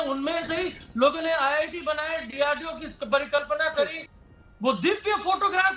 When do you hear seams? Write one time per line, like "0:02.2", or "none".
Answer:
0:04.0